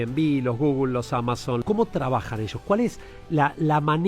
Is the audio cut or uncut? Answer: cut